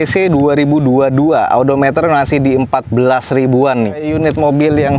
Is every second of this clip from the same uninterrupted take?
no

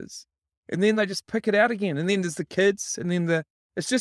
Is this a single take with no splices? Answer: yes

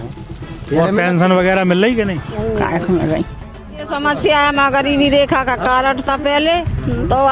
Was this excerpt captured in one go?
no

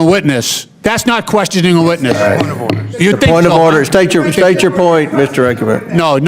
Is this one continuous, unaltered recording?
yes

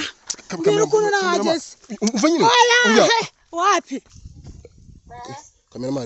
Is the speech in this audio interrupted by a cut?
yes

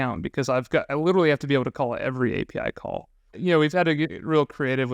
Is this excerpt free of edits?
no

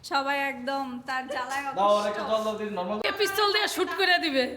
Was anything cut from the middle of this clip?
yes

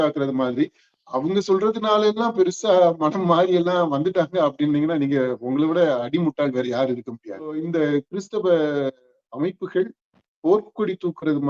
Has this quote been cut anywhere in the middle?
yes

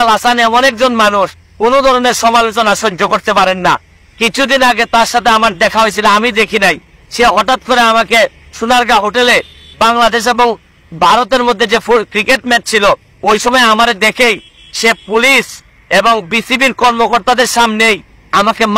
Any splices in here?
no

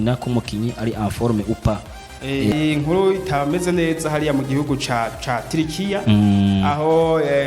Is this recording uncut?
no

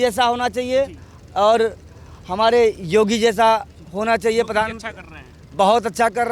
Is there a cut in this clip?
no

